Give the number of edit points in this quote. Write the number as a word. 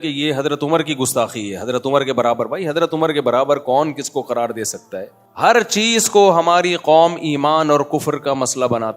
one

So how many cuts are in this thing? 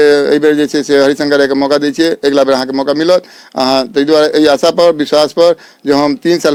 zero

